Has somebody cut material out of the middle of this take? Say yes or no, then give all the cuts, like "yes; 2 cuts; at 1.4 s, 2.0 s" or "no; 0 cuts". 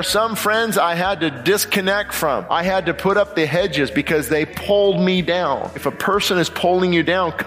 yes; 3 cuts; at 2.4 s, 4.5 s, 5.9 s